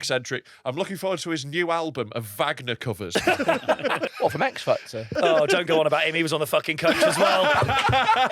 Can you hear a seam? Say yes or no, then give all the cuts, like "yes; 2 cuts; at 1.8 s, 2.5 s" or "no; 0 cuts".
yes; 3 cuts; at 3.1 s, 4.1 s, 5.1 s